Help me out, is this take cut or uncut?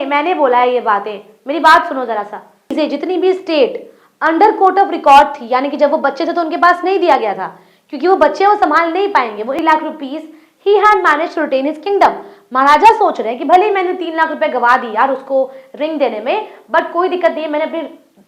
cut